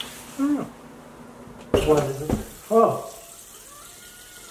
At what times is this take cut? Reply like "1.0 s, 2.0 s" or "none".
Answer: 1.7 s